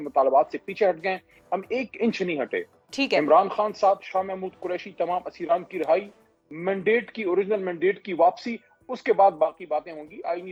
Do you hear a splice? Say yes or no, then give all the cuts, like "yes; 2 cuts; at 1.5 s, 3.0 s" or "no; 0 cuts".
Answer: no; 0 cuts